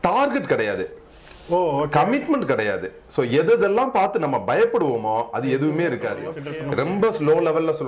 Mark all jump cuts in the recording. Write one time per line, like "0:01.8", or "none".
0:06.5